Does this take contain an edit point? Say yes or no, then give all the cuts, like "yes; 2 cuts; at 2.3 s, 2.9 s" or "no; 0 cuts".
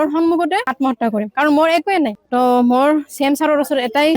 yes; 1 cut; at 2.2 s